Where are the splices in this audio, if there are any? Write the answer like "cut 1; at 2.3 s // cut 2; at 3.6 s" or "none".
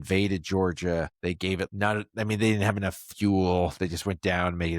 cut 1; at 1.3 s